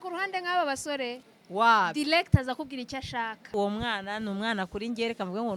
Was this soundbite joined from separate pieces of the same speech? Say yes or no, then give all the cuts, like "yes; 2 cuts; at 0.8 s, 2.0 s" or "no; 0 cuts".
yes; 1 cut; at 3.5 s